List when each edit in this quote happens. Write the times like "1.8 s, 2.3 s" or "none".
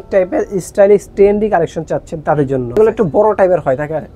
2.8 s